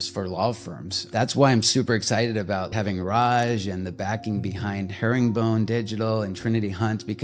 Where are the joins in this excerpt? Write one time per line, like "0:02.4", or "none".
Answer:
0:01.0
0:02.7